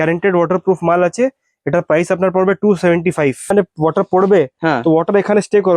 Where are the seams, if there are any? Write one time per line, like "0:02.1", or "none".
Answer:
0:03.5